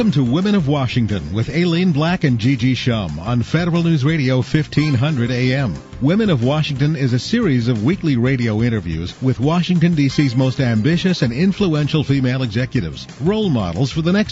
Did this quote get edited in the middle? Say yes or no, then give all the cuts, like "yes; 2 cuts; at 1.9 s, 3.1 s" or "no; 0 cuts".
no; 0 cuts